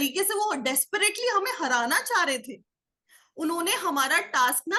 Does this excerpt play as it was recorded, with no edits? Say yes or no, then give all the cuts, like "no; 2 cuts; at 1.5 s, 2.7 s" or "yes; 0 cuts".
yes; 0 cuts